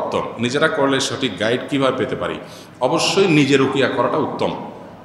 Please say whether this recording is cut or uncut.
uncut